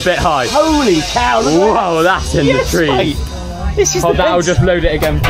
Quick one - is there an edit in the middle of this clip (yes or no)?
no